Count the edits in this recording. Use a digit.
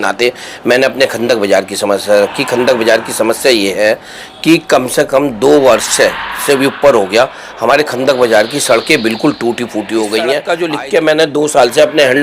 1